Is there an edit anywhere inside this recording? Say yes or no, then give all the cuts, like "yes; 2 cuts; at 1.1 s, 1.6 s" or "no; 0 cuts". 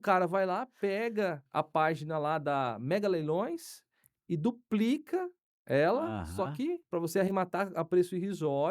yes; 2 cuts; at 1.4 s, 6.8 s